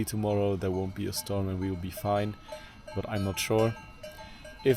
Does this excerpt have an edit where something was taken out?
no; 0 cuts

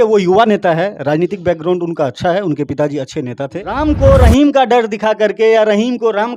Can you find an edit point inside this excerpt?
yes; 1 cut; at 3.6 s

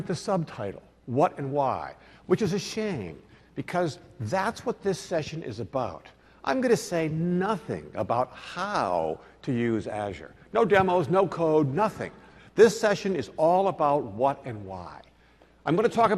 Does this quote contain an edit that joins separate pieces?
no; 0 cuts

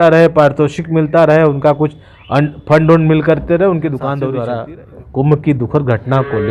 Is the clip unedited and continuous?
no; 1 cut; at 4.3 s

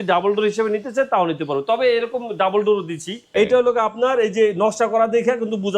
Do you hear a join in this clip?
yes; 1 cut; at 3.2 s

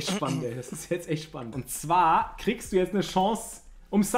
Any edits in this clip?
yes; 1 cut; at 1.5 s

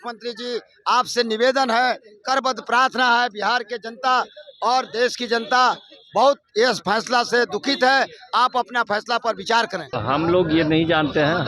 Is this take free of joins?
no; 1 cut; at 9.9 s

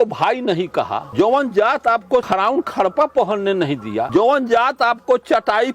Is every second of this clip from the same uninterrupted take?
no; 3 cuts; at 1.1 s, 2.3 s, 4.1 s

